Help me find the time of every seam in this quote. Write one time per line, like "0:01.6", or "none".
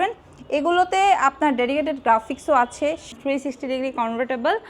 0:03.1

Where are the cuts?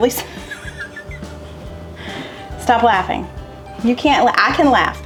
none

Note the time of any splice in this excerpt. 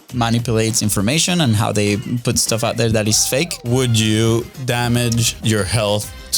0:03.6
0:05.3

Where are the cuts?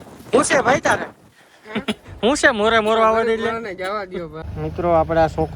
0:04.4

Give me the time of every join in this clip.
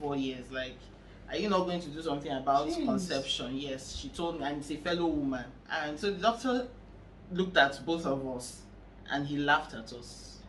0:06.0

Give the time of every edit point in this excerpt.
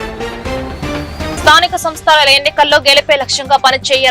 none

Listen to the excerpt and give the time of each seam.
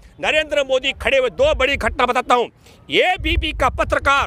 none

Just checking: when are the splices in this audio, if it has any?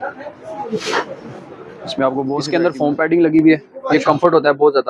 0:02.5

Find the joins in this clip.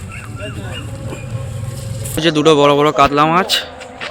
0:02.2

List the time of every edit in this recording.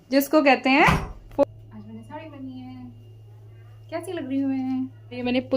0:01.2

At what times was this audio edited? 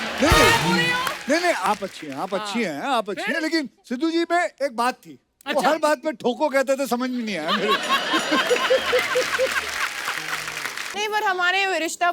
0:10.9

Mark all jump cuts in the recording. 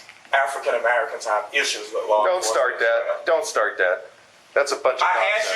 none

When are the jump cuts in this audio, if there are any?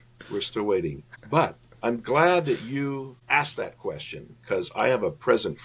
0:01.1
0:03.1

